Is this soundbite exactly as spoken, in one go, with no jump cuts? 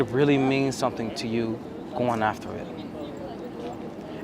yes; 0 cuts

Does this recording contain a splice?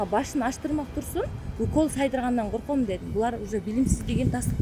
no; 0 cuts

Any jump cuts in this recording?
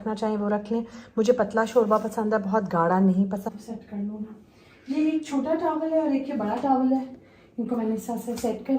yes; 1 cut; at 3.4 s

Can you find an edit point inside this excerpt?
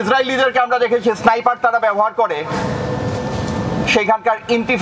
no; 0 cuts

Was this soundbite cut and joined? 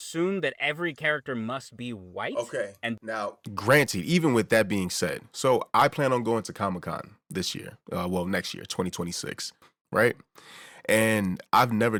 no; 0 cuts

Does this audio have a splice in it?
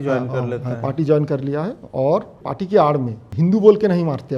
yes; 2 cuts; at 2.4 s, 3.2 s

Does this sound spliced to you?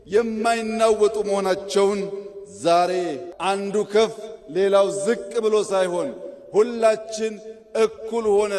yes; 1 cut; at 3.3 s

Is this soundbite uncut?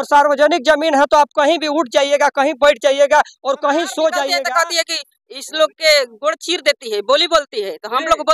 no; 1 cut; at 4.4 s

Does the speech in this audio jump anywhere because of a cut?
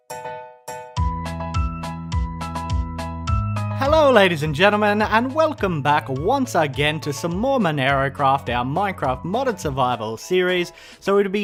no; 0 cuts

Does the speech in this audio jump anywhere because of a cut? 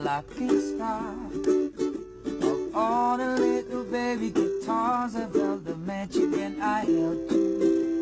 no; 0 cuts

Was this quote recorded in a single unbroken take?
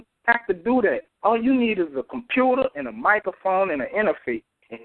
yes; 0 cuts

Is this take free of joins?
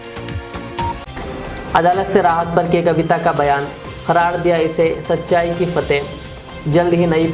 yes; 0 cuts

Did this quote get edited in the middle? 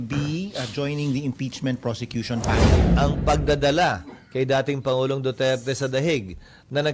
yes; 1 cut; at 2.9 s

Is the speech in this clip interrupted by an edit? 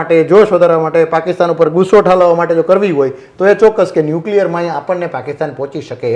no; 0 cuts

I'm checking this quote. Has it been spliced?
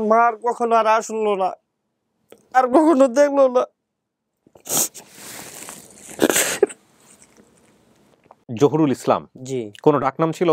yes; 1 cut; at 8.5 s

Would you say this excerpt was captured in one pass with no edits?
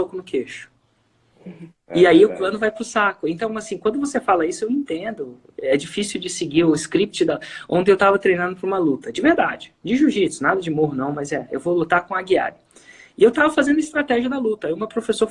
yes; 0 cuts

